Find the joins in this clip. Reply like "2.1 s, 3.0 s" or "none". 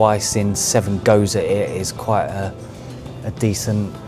none